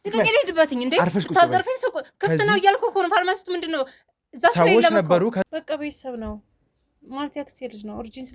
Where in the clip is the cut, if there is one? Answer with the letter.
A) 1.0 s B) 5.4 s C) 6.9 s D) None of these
B